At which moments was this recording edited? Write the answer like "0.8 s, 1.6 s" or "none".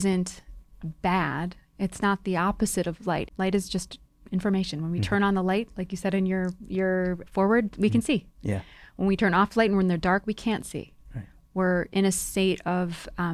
3.3 s